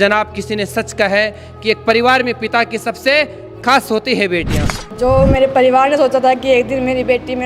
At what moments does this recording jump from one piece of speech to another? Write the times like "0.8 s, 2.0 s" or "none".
5.0 s